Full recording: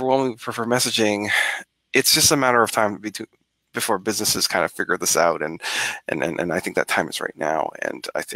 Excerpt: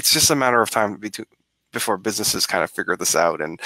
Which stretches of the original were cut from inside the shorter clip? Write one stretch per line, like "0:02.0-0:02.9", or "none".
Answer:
none